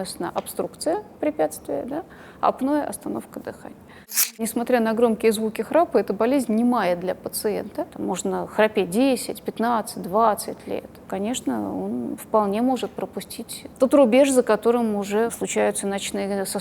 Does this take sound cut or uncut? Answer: cut